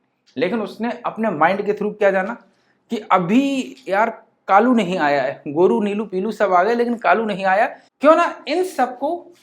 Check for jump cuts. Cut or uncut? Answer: cut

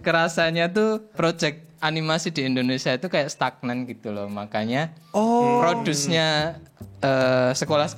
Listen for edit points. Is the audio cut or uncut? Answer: cut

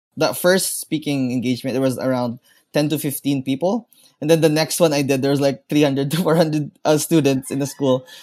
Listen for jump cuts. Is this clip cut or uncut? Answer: uncut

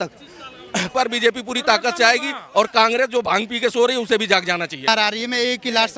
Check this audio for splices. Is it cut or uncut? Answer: cut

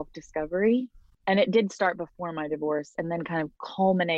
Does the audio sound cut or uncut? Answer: cut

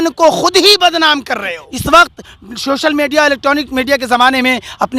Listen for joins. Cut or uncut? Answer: cut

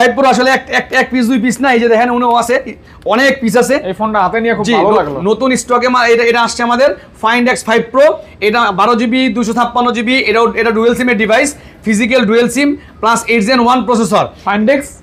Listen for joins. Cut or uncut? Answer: uncut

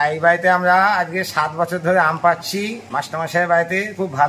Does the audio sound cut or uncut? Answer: cut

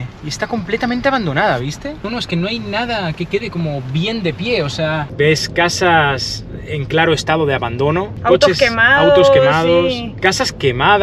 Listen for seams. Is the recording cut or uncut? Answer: cut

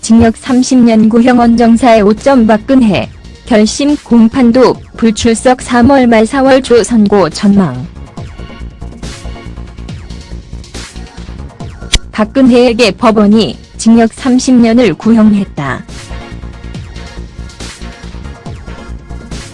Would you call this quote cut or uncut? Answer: cut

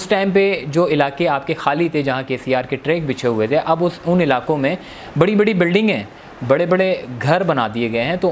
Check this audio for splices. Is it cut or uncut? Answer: uncut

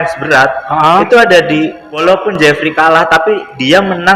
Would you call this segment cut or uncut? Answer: cut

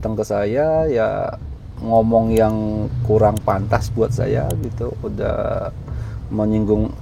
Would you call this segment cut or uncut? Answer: uncut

